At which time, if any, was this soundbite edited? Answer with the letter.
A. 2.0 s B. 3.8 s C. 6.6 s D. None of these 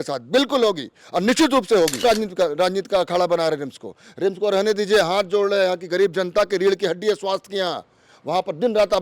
A